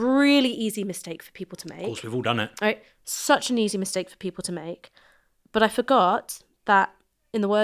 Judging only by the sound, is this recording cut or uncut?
uncut